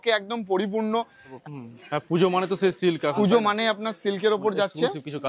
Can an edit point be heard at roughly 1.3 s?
yes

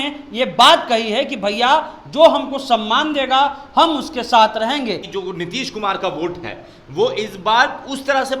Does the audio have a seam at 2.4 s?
no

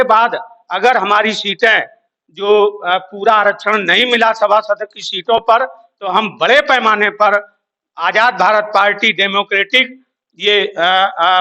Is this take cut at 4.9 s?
no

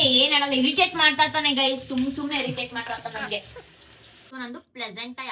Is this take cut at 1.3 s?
no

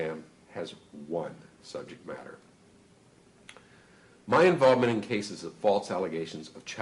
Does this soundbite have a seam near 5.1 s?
yes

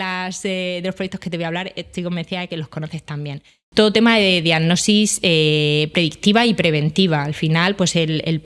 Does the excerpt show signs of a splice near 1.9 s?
no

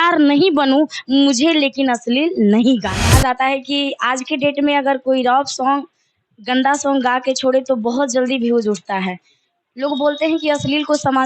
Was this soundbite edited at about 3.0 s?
yes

